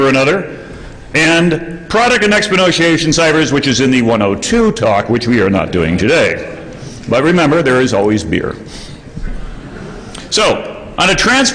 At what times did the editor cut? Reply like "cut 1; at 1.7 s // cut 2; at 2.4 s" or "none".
none

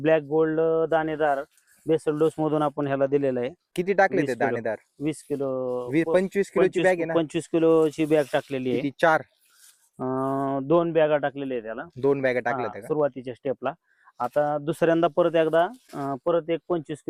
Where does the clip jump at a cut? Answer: none

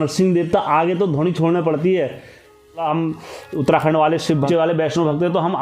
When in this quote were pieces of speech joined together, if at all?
cut 1; at 2.8 s // cut 2; at 4.5 s

